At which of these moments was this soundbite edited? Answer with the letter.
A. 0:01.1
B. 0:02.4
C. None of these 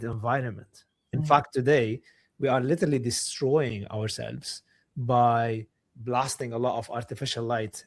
A